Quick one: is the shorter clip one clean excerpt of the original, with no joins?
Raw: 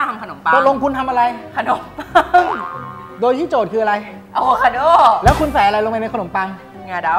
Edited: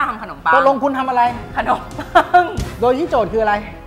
no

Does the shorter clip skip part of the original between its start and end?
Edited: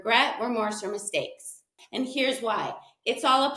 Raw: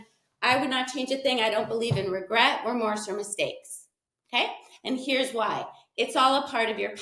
yes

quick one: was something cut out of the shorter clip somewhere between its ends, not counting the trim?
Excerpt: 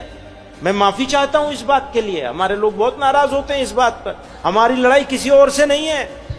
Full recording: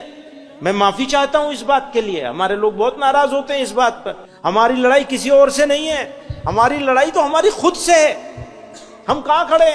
no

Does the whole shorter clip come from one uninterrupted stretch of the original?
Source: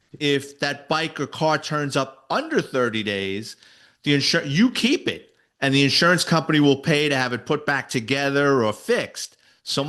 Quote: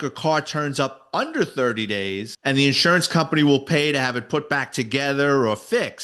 no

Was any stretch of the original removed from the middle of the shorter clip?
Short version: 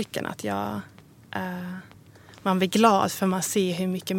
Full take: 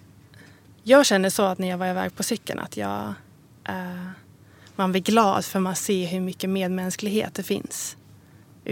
no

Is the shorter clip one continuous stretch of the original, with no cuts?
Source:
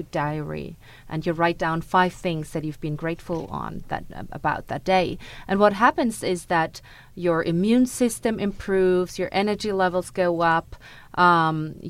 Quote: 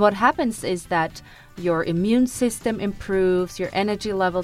yes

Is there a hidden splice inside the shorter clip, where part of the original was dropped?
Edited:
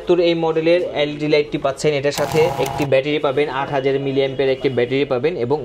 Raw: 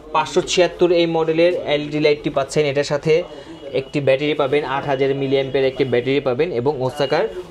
yes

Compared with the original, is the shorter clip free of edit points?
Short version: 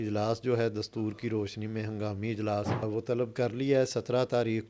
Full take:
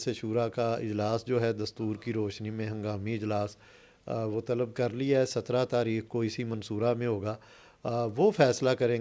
no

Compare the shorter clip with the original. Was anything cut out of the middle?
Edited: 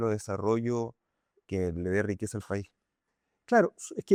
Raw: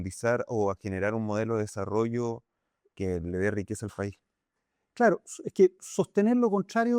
no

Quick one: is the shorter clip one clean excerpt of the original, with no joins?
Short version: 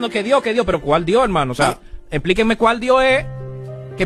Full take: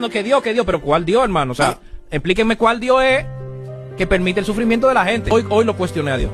yes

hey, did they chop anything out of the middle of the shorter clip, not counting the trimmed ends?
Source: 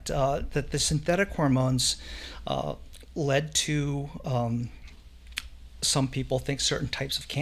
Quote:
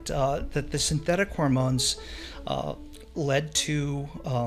no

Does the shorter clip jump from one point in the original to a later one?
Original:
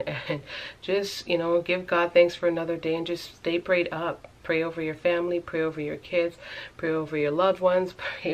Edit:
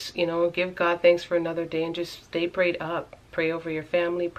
no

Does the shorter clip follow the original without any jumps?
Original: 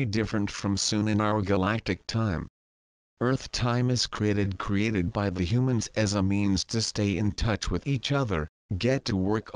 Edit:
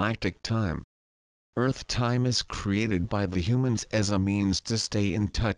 no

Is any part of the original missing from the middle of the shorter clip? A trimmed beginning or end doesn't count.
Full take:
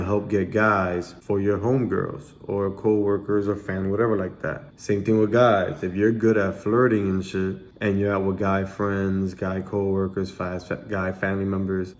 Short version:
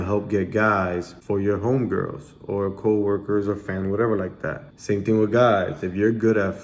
no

